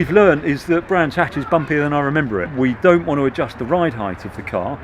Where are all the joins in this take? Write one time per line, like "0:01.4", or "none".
0:02.4